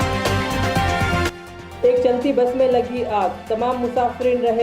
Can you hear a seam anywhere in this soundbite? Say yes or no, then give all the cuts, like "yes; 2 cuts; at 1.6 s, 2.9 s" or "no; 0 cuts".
yes; 1 cut; at 1.0 s